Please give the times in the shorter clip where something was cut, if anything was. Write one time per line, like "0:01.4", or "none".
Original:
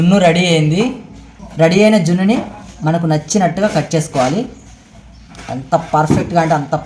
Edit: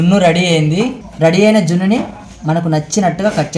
0:01.0